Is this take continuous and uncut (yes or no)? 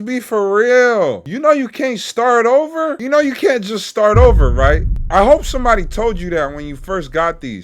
no